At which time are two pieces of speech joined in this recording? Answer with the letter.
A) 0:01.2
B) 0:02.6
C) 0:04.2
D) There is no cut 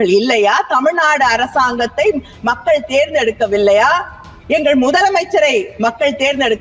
D